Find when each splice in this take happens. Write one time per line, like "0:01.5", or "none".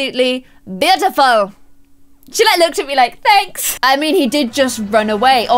0:03.6

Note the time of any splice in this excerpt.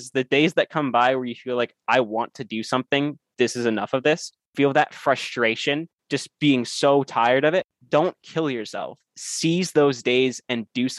0:04.5
0:06.0
0:07.8

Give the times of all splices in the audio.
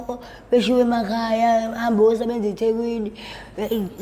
none

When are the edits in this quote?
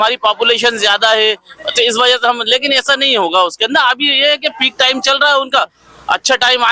none

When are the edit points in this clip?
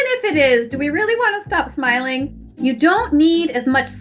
0:02.3

